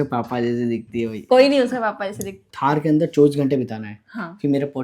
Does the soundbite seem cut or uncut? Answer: cut